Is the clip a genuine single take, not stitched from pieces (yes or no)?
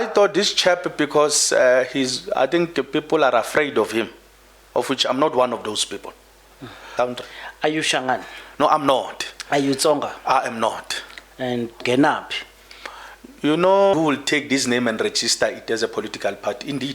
no